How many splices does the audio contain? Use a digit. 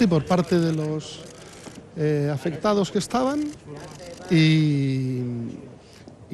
0